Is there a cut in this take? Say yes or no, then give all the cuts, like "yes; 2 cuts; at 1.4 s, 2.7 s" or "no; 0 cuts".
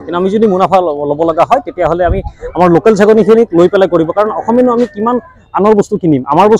no; 0 cuts